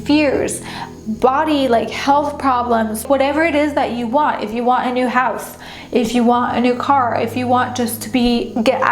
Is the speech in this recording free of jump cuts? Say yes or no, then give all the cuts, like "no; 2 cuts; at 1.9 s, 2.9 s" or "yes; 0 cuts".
no; 1 cut; at 3.0 s